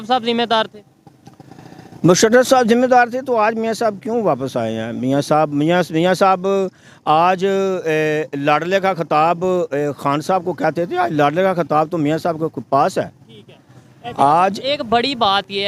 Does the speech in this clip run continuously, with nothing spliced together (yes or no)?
yes